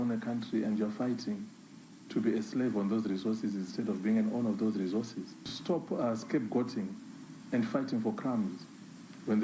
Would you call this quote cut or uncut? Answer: cut